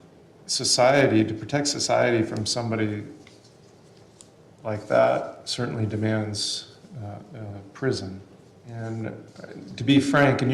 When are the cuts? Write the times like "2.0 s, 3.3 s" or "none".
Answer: 8.7 s